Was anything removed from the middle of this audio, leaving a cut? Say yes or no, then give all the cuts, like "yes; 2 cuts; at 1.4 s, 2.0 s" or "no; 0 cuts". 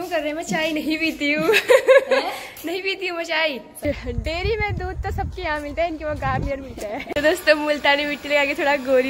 yes; 2 cuts; at 3.7 s, 7.0 s